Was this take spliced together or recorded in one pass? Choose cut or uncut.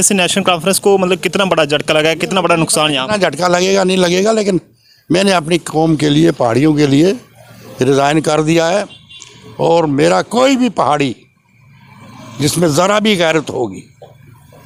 uncut